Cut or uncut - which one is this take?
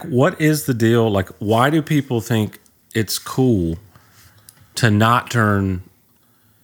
uncut